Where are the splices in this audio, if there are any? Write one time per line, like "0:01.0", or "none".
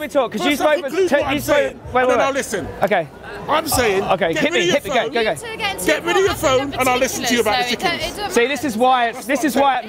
none

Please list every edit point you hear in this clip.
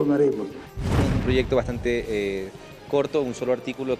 0:00.9

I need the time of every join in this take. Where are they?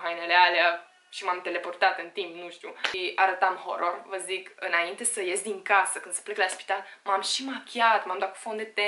0:02.9

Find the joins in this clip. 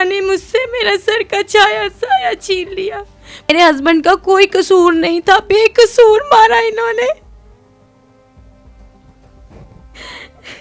0:03.5

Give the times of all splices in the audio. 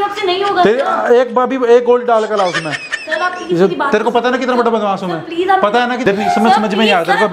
0:06.0

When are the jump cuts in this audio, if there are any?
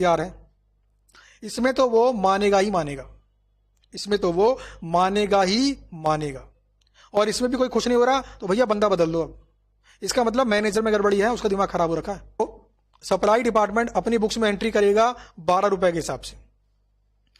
0:12.4

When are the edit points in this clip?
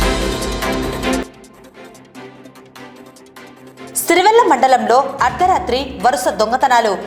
none

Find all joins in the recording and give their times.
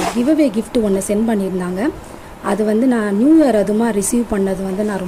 none

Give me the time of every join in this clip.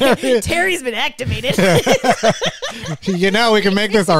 none

